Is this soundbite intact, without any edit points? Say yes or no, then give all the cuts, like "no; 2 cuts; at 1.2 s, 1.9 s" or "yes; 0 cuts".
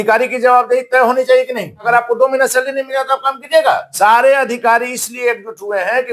no; 2 cuts; at 1.9 s, 3.9 s